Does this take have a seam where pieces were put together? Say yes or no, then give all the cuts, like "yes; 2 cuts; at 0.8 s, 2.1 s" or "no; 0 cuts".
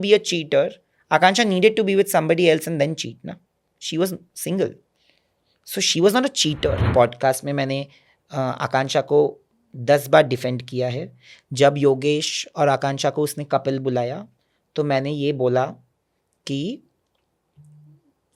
yes; 1 cut; at 6.8 s